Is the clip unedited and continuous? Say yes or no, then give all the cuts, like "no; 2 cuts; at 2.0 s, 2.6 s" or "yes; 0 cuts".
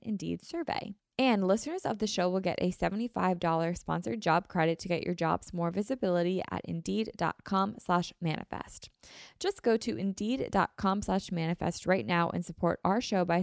no; 1 cut; at 1.0 s